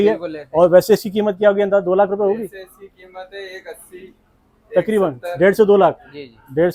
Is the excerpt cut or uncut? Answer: uncut